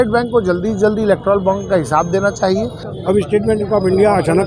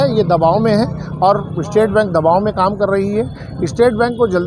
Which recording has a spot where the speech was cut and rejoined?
first; 1 cut; at 2.9 s

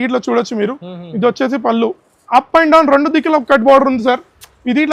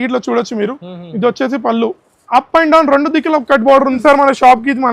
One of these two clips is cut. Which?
second; 1 cut; at 4.0 s

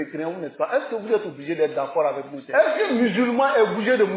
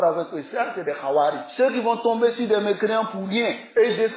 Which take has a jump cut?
first; 1 cut; at 2.3 s

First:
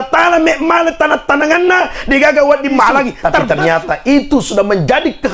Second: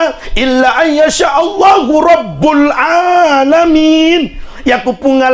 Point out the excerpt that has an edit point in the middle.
first; 1 cut; at 3.3 s

